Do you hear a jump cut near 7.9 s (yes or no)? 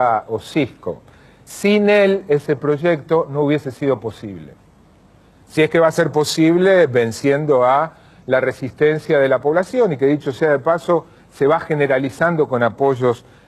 yes